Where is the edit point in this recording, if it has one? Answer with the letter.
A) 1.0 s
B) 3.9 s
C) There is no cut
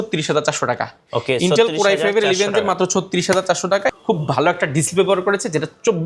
B